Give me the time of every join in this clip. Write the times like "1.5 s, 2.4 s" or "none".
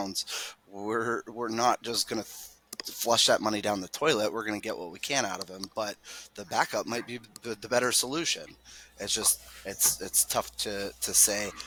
none